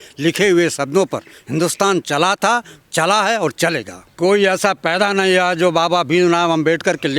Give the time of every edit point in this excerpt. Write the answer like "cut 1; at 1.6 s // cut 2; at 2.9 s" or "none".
cut 1; at 4.0 s